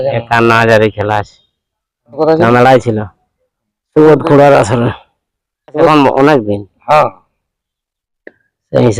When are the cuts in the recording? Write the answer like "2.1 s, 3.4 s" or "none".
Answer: 2.2 s, 5.9 s